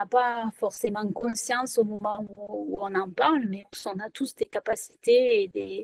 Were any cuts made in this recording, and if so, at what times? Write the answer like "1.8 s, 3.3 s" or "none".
3.8 s